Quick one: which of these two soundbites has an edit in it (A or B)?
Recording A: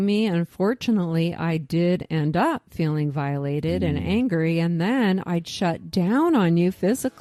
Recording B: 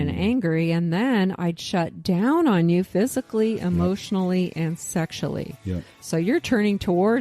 B